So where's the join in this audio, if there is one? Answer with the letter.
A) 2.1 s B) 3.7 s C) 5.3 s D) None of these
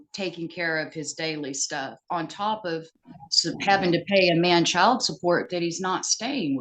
D